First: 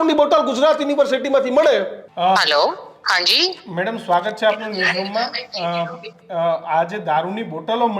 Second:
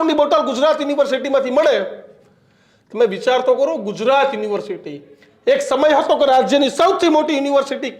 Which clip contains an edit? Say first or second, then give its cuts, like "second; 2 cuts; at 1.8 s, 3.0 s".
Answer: first; 1 cut; at 2.0 s